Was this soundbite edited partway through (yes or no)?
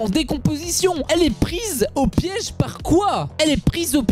yes